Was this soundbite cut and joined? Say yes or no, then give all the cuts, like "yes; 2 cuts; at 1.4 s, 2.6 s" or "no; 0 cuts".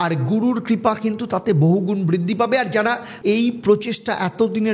yes; 1 cut; at 3.1 s